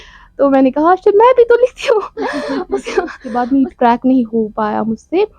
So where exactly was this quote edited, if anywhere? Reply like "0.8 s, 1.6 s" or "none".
3.2 s